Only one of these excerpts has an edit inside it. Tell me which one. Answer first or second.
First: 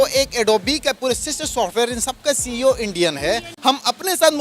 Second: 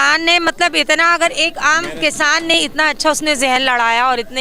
first